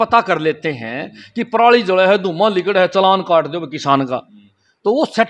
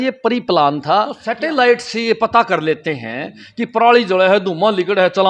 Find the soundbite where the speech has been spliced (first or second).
second